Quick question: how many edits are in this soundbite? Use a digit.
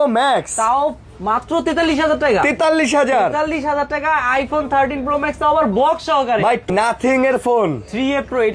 1